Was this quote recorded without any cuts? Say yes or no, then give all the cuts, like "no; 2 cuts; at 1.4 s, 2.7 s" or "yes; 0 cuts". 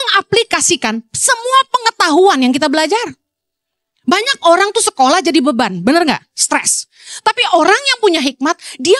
yes; 0 cuts